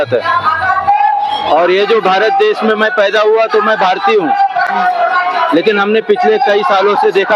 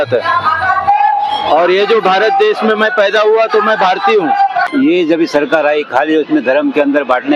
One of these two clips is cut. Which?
second; 1 cut; at 4.7 s

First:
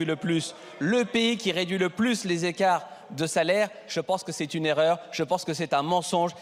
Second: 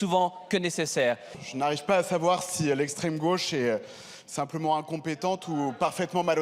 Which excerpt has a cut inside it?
second; 1 cut; at 1.3 s

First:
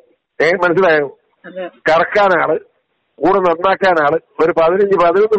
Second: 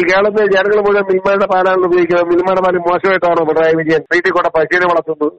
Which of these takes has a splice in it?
second; 1 cut; at 4.1 s

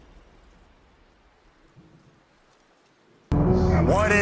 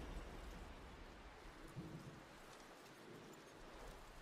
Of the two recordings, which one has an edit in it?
first; 1 cut; at 3.2 s

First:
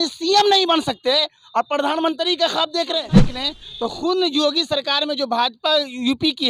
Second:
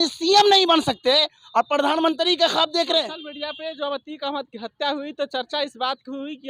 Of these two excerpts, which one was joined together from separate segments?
first; 1 cut; at 3.3 s

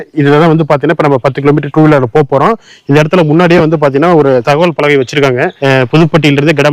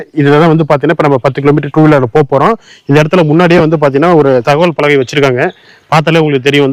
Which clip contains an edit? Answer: first; 1 cut; at 5.5 s

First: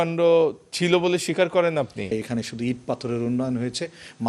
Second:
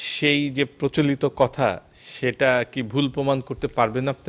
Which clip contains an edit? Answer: first; 1 cut; at 2.1 s

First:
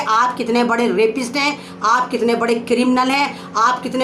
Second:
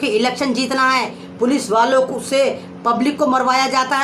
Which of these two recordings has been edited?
second; 1 cut; at 1.2 s

